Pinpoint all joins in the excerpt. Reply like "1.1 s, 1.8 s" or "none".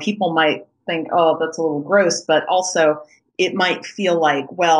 3.2 s